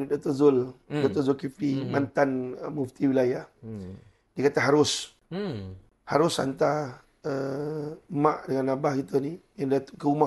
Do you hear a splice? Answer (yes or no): no